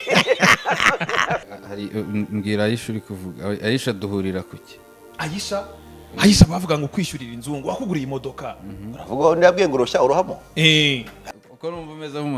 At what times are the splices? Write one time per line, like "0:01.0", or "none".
0:01.4
0:11.2